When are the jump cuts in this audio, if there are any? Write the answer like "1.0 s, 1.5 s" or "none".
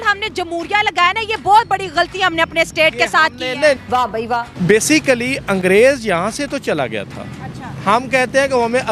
4.3 s

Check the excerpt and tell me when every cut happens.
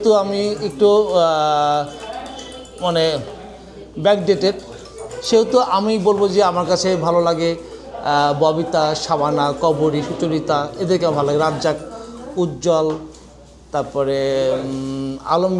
none

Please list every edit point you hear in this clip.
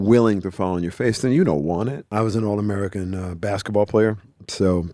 2.1 s

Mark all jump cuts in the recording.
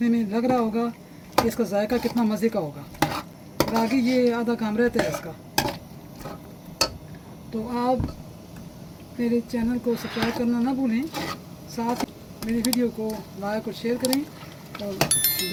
none

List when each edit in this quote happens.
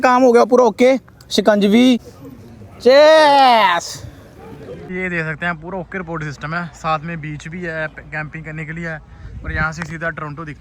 2.2 s, 4.8 s

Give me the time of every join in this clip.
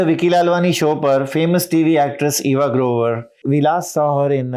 none

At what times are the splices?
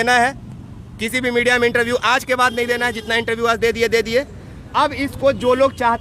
none

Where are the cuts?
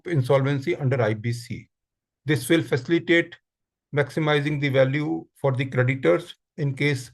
none

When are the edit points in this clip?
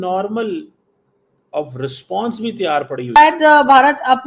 3.2 s

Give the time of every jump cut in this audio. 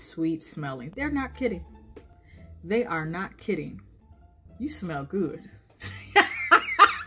3.9 s

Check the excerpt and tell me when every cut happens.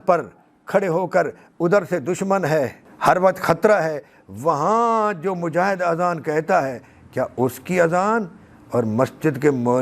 2.8 s

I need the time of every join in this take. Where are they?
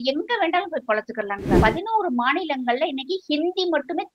1.5 s

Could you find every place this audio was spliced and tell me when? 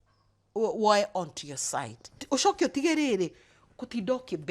2.2 s

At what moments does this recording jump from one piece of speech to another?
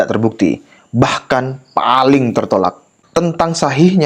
2.9 s

